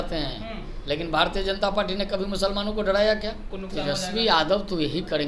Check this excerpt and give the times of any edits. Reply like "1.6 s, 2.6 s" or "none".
3.5 s